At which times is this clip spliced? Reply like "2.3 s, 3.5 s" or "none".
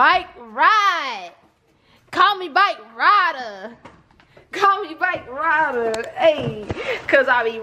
none